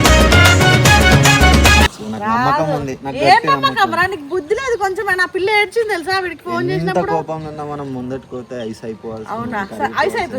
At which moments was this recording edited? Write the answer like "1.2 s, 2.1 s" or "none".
1.9 s